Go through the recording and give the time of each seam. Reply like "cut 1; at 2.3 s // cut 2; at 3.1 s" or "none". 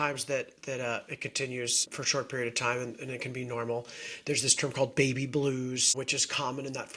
cut 1; at 1.9 s // cut 2; at 5.9 s